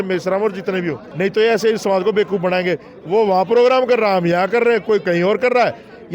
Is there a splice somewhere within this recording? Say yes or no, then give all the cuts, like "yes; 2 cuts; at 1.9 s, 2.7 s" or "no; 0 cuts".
yes; 1 cut; at 1.1 s